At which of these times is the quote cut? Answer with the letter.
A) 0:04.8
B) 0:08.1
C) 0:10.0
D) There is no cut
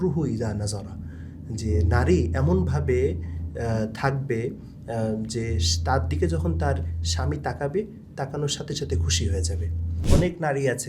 C